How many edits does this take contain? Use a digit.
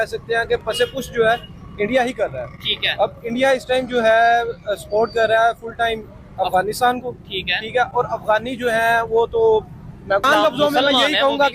1